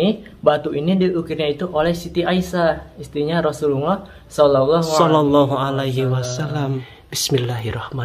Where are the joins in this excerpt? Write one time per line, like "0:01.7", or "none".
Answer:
0:06.9